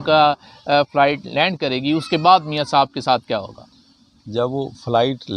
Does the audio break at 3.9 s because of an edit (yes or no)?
no